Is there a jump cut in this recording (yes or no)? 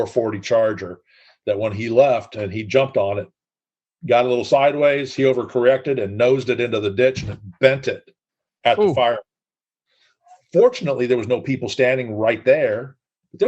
no